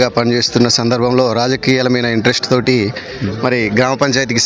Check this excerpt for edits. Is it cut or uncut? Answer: uncut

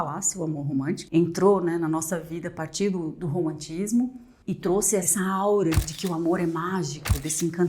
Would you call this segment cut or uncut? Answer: cut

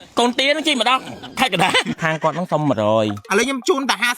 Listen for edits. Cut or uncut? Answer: cut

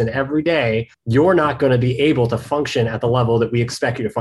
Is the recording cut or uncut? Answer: cut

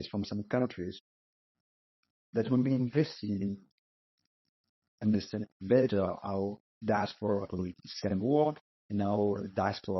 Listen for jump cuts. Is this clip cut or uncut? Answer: uncut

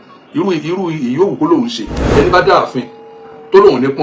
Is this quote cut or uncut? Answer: cut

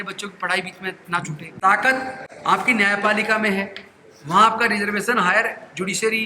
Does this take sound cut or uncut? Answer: cut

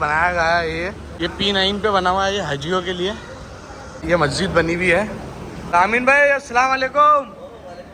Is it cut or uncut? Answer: cut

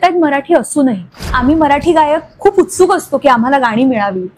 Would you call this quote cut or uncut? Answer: cut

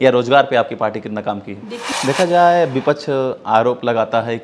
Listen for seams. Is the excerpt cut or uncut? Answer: cut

